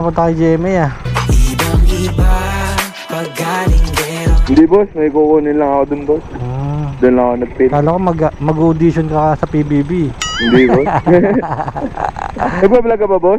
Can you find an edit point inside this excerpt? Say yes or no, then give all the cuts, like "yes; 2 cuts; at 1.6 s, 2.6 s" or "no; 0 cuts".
no; 0 cuts